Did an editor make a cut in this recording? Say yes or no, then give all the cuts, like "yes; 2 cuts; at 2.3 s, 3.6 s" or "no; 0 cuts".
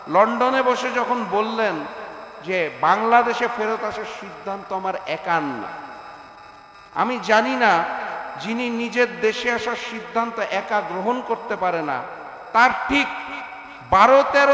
no; 0 cuts